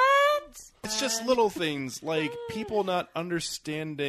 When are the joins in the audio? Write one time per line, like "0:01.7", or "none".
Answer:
0:00.9